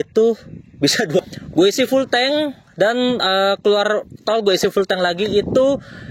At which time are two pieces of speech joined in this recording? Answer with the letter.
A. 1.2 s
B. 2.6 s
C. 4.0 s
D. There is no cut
A